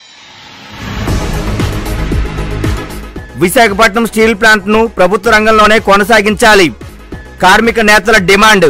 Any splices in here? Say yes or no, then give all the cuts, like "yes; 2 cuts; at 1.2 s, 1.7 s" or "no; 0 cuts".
no; 0 cuts